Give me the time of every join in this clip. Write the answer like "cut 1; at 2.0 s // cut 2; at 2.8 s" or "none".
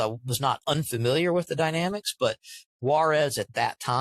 cut 1; at 2.6 s

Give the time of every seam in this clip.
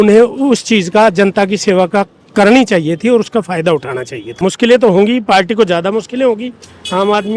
cut 1; at 4.4 s

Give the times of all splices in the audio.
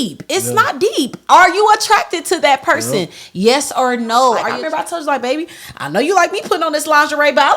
cut 1; at 4.5 s

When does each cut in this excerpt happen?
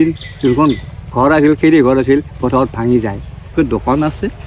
cut 1; at 3.5 s

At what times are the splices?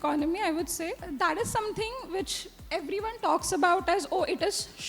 cut 1; at 1.0 s

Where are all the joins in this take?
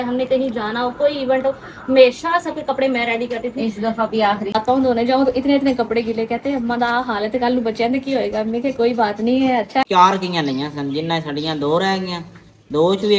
cut 1; at 4.5 s // cut 2; at 9.8 s

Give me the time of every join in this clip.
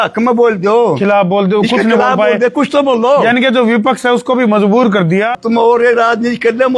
cut 1; at 5.3 s

